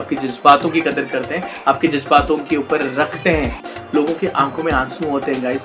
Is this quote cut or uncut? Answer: cut